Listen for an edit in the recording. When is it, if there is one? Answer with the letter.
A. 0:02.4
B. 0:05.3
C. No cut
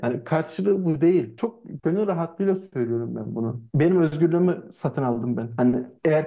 C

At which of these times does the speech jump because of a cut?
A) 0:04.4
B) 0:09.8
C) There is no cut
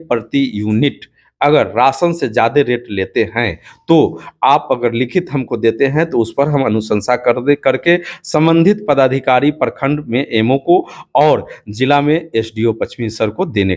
C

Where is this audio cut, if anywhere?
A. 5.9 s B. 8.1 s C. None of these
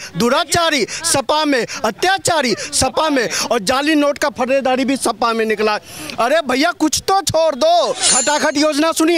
B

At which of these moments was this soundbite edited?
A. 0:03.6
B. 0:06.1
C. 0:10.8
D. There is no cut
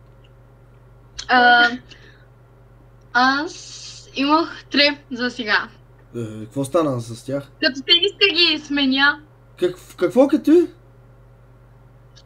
D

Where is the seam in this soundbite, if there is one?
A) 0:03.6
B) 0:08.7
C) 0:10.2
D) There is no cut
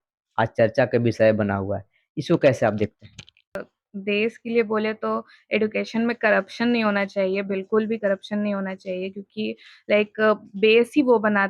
A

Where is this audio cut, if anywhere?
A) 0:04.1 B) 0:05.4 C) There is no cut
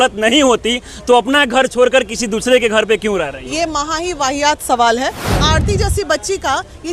B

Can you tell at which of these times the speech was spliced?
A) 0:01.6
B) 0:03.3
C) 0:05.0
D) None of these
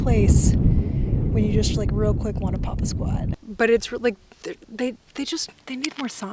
B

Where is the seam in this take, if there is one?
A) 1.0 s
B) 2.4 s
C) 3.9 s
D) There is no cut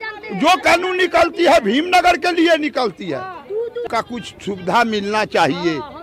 C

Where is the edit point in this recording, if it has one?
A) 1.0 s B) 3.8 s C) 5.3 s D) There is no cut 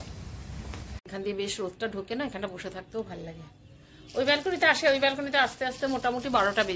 A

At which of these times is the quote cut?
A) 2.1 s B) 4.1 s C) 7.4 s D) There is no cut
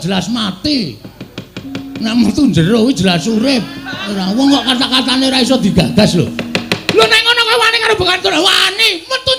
B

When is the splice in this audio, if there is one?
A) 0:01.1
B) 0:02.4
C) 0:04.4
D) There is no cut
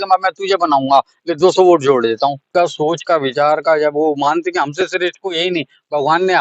B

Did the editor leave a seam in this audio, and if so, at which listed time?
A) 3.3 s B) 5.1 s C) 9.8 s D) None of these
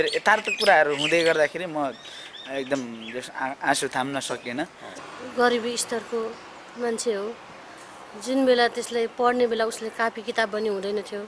B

